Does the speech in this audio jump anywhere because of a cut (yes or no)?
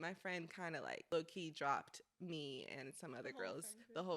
yes